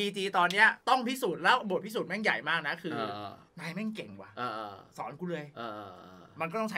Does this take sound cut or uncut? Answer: cut